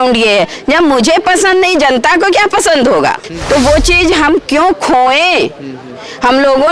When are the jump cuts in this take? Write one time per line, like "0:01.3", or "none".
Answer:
0:03.3